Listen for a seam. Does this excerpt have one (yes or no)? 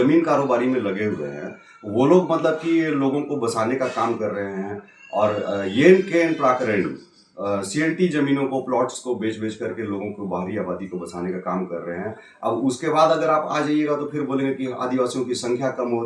no